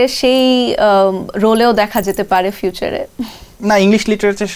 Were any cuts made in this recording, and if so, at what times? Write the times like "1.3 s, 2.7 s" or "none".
none